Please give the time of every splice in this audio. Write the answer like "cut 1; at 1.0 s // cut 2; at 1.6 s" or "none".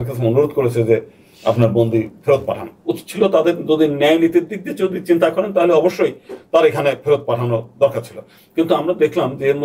none